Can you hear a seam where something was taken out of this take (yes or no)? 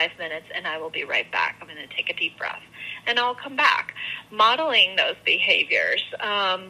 no